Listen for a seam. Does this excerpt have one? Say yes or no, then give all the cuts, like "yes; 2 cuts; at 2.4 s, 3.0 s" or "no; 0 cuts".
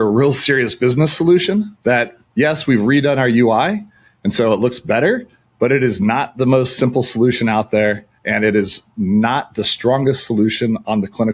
no; 0 cuts